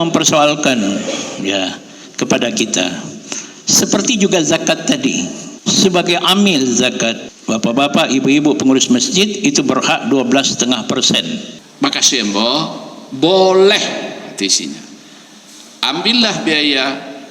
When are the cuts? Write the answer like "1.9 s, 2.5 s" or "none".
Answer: 5.4 s, 7.3 s, 11.6 s